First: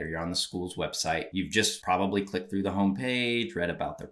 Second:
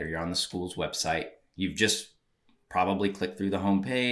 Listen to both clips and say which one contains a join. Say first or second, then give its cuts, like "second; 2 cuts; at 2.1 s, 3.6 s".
first; 1 cut; at 1.4 s